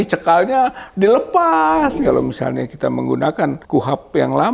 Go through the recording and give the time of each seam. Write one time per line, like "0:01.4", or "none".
0:02.0
0:03.6